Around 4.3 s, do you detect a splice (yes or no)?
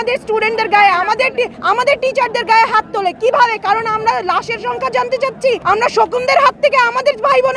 no